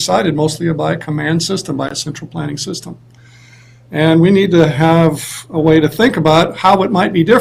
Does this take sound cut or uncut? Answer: cut